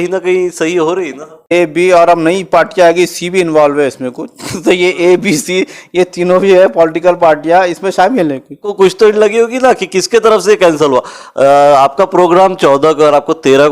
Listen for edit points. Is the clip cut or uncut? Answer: cut